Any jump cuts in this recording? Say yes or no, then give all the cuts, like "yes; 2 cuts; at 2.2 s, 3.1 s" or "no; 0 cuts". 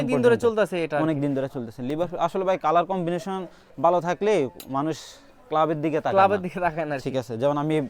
no; 0 cuts